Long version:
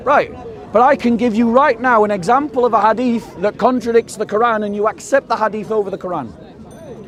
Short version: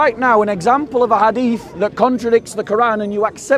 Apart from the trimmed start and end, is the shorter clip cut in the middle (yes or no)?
no